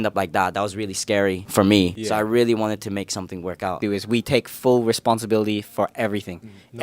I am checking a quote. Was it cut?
yes; 1 cut; at 3.8 s

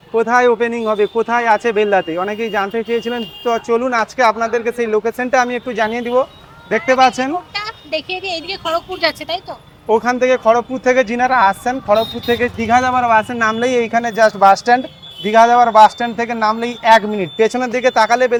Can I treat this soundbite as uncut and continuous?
yes; 0 cuts

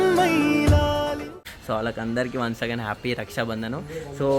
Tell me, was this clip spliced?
no; 0 cuts

